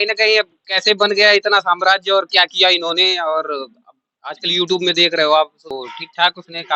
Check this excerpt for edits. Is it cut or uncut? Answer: cut